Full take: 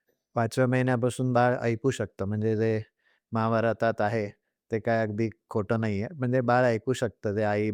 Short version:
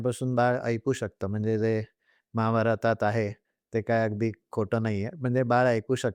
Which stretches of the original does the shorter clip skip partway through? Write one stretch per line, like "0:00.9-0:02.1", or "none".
none